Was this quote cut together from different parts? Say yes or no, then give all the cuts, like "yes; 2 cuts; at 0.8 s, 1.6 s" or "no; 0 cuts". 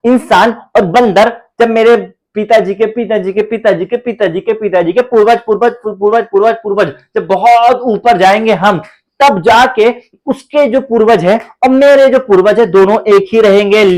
no; 0 cuts